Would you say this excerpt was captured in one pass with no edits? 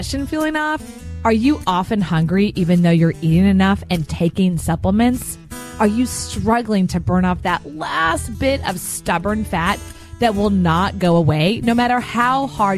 yes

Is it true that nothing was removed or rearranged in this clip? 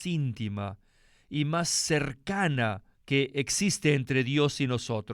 no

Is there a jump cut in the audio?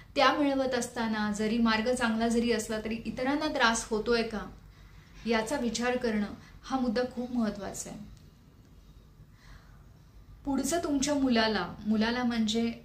no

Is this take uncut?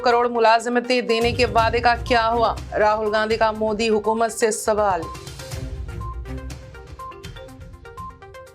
yes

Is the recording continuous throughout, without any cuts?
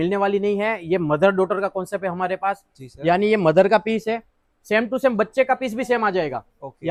yes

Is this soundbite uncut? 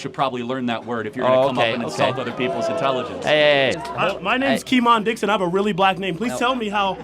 no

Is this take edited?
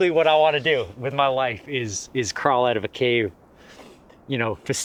no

